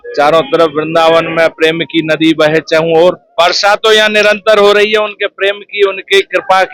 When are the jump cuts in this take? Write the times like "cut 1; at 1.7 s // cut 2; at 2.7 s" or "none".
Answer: cut 1; at 3.3 s

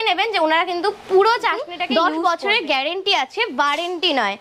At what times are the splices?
cut 1; at 1.8 s

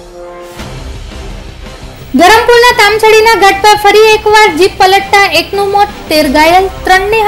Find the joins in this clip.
cut 1; at 1.8 s

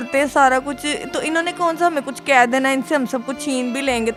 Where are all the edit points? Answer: none

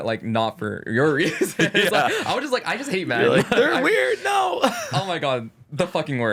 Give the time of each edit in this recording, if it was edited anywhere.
none

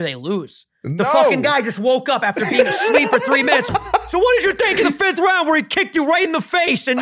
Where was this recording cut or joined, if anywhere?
none

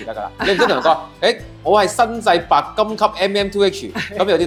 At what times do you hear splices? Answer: none

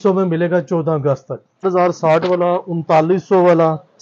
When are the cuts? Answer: cut 1; at 1.6 s

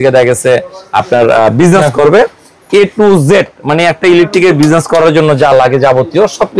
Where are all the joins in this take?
none

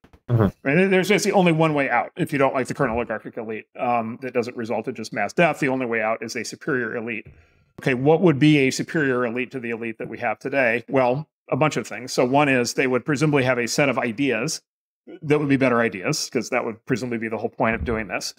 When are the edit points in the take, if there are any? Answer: cut 1; at 7.8 s

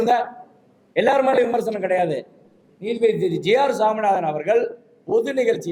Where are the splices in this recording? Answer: none

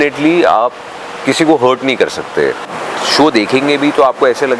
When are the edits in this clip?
cut 1; at 2.8 s

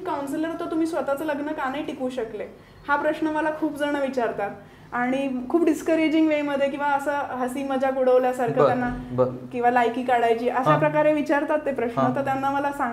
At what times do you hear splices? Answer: none

